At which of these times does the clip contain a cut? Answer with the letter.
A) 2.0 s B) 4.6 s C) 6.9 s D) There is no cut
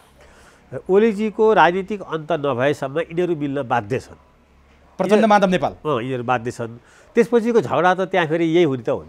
D